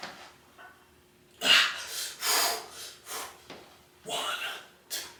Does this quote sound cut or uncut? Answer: uncut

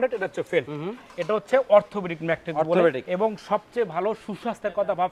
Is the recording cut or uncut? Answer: uncut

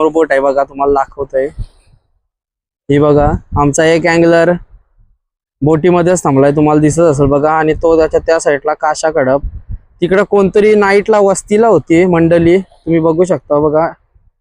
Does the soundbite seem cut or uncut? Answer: uncut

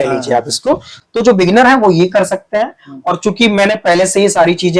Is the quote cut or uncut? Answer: cut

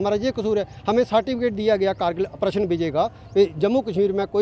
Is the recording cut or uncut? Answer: uncut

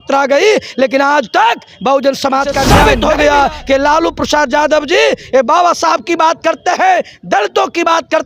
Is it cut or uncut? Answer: cut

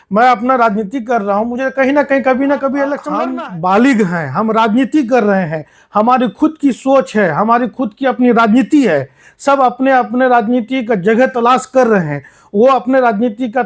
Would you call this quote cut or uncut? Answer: cut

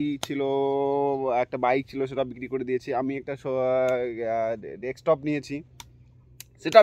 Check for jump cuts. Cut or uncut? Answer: uncut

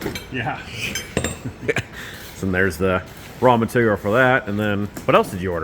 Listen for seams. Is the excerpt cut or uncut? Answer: uncut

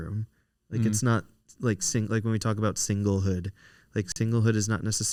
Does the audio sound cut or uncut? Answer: uncut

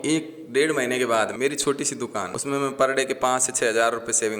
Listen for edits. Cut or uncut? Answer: cut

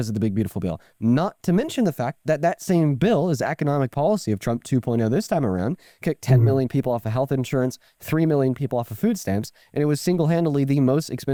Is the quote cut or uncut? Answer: uncut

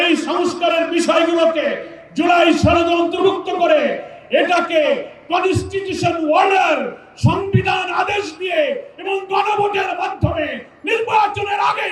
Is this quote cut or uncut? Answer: uncut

